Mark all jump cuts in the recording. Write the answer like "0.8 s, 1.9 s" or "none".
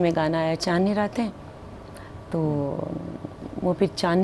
none